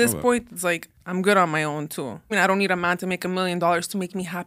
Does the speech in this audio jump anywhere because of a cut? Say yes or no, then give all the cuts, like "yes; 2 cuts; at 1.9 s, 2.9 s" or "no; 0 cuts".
yes; 2 cuts; at 0.9 s, 2.3 s